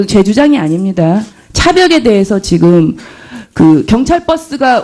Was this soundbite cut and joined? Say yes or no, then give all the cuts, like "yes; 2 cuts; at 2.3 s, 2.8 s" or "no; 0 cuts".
yes; 1 cut; at 3.0 s